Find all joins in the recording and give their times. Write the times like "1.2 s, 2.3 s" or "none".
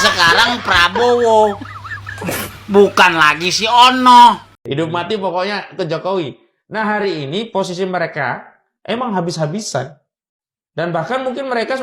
4.5 s